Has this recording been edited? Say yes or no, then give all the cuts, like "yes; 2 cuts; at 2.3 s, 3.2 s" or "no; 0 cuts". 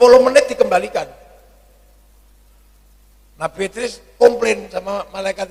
no; 0 cuts